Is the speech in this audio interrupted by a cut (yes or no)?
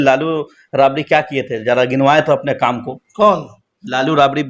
no